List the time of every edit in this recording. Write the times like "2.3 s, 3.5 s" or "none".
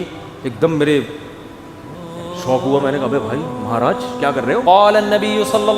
4.6 s